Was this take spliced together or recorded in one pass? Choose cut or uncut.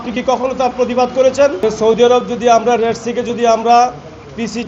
cut